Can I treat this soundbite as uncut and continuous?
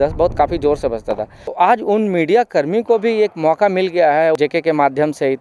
no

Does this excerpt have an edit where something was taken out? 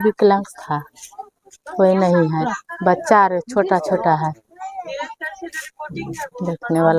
no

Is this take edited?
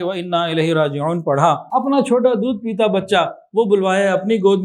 yes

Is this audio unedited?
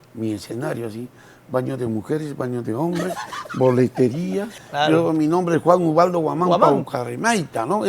no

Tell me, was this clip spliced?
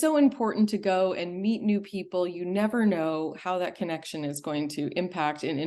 no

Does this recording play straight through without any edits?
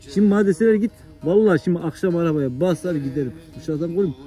yes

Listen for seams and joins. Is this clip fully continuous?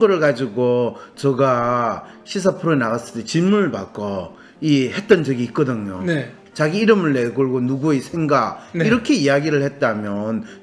no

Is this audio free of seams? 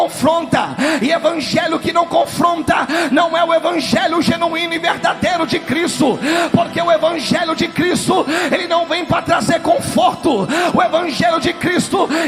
yes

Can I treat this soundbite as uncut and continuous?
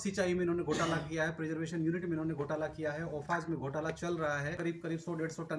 no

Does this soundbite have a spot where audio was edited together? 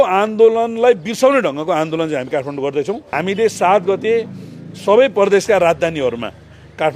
yes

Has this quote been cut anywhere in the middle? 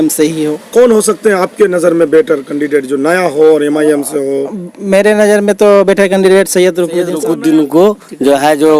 yes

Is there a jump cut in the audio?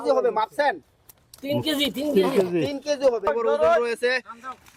yes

